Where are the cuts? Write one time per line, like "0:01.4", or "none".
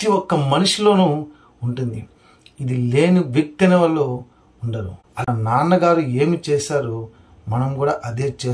0:05.3